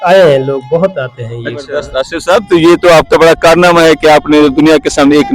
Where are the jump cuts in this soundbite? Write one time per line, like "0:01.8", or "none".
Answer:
0:01.6